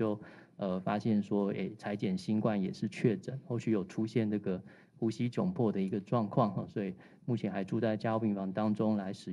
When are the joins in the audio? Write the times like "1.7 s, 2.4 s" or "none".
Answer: none